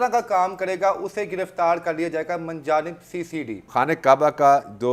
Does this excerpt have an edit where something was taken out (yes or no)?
yes